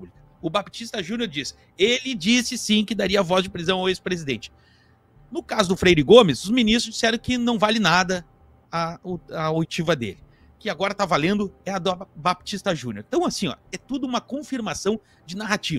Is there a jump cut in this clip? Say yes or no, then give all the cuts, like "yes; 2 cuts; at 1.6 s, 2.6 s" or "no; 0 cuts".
no; 0 cuts